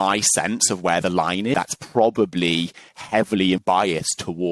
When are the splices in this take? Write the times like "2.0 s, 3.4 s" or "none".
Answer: 1.5 s, 3.6 s